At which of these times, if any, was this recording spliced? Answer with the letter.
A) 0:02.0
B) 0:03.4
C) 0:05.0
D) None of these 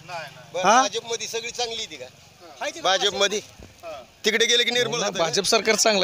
C